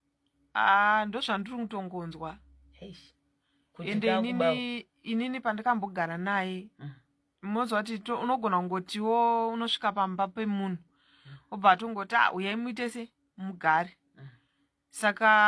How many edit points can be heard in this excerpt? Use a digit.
0